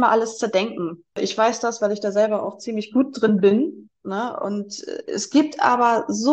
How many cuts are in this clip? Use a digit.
1